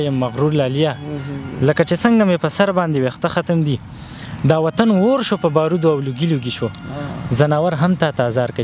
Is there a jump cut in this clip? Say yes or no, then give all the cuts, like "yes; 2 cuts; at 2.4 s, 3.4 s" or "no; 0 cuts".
no; 0 cuts